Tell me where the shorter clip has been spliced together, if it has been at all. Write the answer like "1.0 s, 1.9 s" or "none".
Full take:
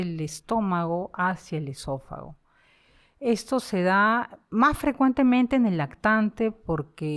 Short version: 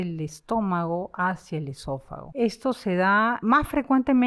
2.2 s, 3.4 s